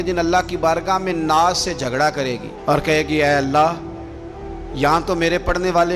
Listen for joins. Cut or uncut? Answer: uncut